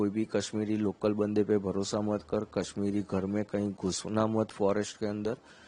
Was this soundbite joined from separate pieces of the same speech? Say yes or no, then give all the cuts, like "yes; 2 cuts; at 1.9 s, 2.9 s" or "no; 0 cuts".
no; 0 cuts